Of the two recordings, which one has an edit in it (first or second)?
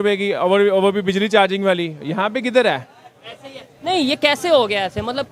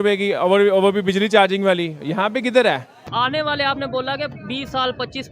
second